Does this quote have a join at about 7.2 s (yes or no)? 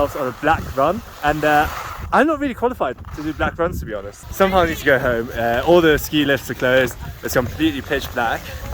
no